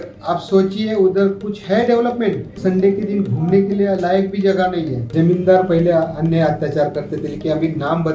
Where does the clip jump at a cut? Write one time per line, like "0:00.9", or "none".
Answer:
0:02.5
0:05.1